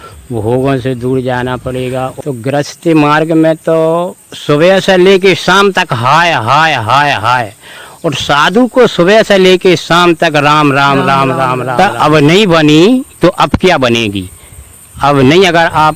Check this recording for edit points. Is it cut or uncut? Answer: cut